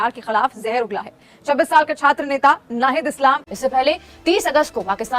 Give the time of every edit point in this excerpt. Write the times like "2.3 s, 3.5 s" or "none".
3.5 s